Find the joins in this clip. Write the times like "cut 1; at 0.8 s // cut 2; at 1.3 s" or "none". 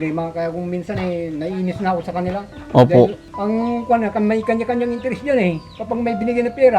cut 1; at 3.3 s